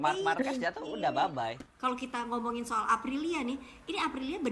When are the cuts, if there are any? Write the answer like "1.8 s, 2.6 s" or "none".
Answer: 1.6 s